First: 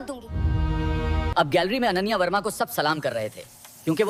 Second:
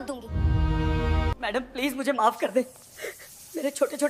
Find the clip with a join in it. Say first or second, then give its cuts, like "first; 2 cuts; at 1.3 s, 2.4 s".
second; 1 cut; at 1.3 s